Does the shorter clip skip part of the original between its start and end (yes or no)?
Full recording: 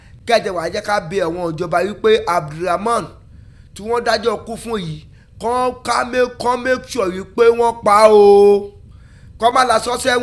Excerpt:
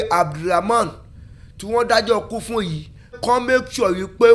yes